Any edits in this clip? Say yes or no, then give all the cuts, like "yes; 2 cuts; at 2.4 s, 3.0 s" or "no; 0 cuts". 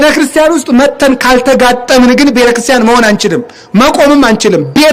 no; 0 cuts